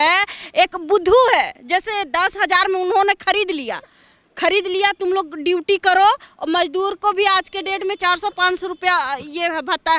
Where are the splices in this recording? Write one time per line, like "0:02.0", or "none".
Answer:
none

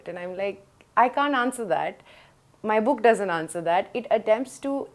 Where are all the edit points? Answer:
none

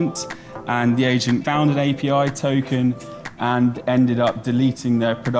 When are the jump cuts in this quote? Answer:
0:01.4

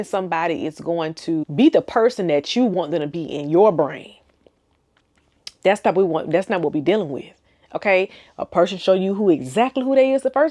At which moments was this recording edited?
0:01.4

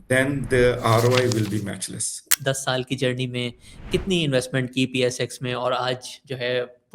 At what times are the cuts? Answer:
0:02.3

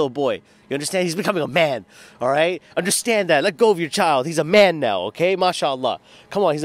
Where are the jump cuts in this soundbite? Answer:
none

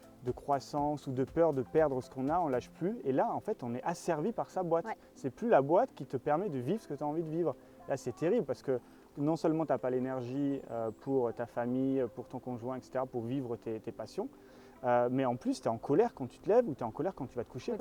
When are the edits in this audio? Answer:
none

